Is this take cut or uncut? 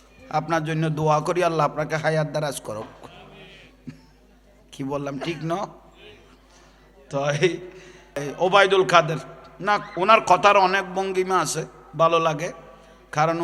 cut